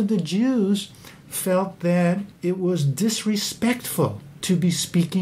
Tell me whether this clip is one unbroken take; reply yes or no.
yes